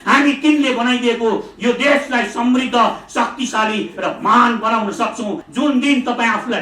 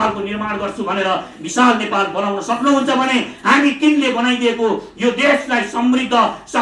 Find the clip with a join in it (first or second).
first